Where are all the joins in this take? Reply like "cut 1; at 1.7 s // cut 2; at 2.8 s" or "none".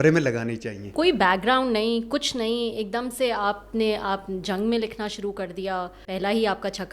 cut 1; at 0.9 s // cut 2; at 6.1 s